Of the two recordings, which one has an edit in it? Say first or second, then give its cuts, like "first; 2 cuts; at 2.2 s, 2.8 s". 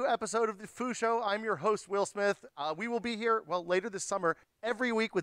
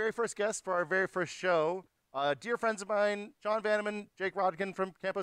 first; 1 cut; at 2.5 s